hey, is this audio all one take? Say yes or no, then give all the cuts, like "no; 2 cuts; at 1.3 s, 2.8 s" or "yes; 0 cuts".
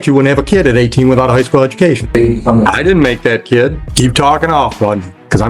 no; 2 cuts; at 2.1 s, 3.8 s